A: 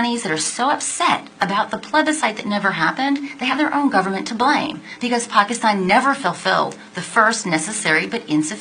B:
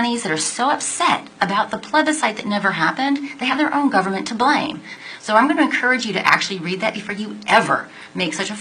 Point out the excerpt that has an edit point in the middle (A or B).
B